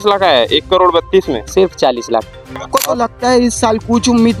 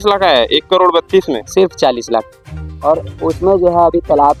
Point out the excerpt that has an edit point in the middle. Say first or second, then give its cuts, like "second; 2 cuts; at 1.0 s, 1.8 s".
first; 1 cut; at 2.6 s